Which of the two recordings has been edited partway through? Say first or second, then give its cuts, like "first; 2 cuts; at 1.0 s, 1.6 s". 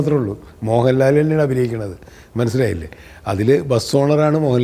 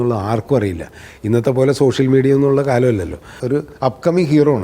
second; 1 cut; at 3.3 s